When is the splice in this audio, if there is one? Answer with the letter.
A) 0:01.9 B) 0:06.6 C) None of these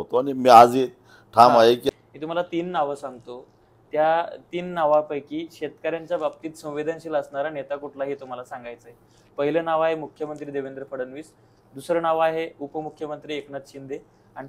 A